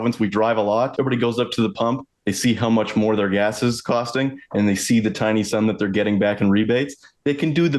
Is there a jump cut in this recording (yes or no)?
yes